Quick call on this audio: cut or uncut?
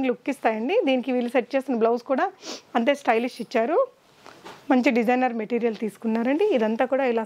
uncut